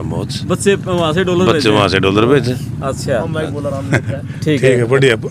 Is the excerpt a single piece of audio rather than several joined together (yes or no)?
yes